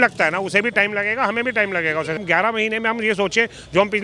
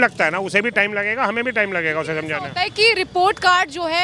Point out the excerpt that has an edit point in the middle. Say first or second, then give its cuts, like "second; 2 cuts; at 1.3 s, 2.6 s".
first; 1 cut; at 2.2 s